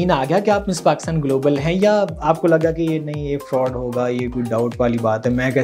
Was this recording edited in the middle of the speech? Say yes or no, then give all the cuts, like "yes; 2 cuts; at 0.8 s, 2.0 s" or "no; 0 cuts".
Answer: no; 0 cuts